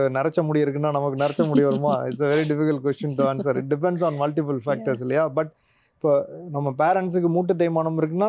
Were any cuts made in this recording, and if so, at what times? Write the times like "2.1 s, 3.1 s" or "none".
none